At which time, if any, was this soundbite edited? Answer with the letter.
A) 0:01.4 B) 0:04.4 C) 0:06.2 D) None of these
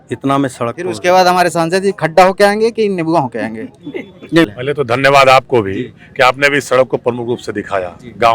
B